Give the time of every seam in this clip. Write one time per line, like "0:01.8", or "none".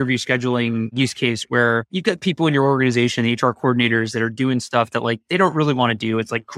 0:00.9
0:01.9